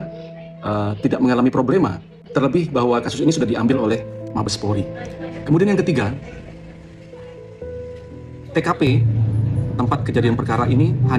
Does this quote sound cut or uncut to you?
uncut